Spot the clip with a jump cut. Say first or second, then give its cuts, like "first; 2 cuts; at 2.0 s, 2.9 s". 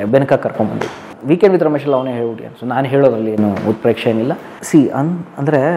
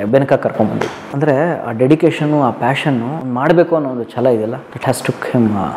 second; 3 cuts; at 1.0 s, 3.2 s, 4.7 s